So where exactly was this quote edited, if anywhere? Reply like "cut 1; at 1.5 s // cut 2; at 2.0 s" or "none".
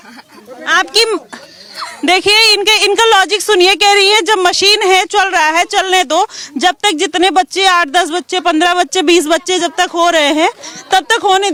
none